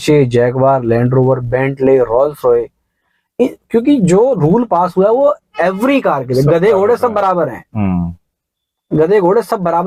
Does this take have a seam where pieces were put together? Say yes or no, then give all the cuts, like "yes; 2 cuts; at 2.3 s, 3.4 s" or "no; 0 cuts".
no; 0 cuts